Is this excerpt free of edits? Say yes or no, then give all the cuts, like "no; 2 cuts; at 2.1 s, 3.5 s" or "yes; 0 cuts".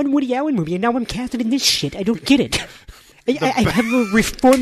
no; 1 cut; at 3.1 s